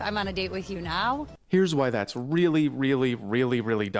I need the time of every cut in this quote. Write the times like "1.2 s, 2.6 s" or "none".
none